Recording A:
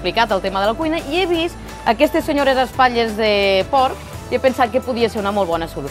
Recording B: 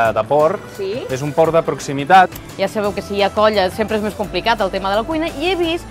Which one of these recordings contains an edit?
B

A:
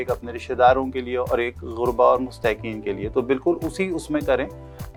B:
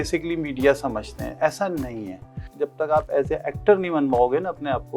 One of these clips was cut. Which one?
B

